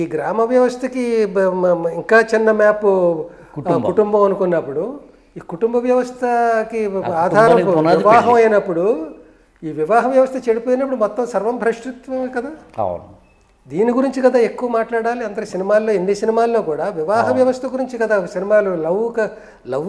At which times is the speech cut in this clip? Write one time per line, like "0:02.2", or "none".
none